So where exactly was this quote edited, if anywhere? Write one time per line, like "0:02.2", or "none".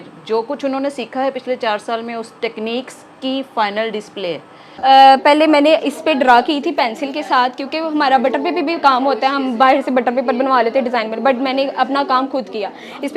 0:04.8

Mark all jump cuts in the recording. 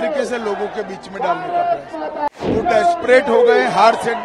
0:02.3

